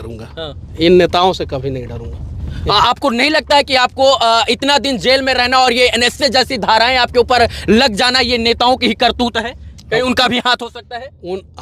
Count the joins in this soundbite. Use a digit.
0